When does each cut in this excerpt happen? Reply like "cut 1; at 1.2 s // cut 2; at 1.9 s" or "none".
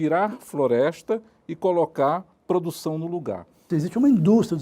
cut 1; at 3.7 s